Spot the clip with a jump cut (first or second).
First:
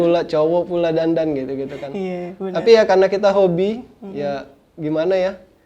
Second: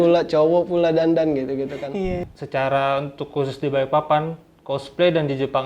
second